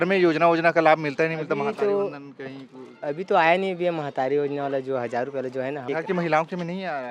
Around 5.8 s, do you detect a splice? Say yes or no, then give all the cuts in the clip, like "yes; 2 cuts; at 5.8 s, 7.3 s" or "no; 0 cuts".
yes; 1 cut; at 5.8 s